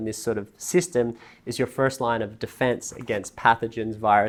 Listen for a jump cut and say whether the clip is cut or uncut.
uncut